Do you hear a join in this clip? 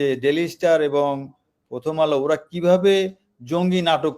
no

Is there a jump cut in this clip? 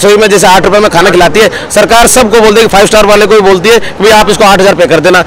no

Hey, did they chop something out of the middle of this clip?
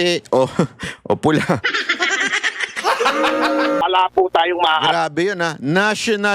yes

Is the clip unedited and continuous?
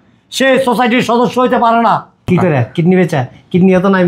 no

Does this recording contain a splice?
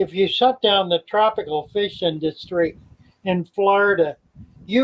no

